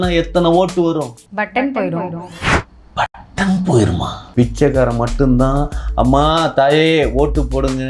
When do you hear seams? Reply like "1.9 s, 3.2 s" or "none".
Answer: 4.2 s